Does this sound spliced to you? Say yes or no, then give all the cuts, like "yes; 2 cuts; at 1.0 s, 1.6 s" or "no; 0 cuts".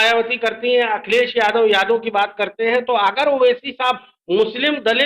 no; 0 cuts